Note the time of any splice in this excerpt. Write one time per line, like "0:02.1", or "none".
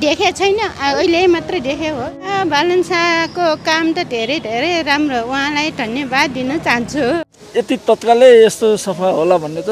0:02.2
0:07.3